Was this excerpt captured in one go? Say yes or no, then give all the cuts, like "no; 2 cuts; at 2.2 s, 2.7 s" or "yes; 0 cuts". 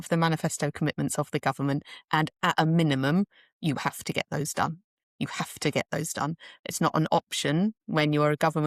yes; 0 cuts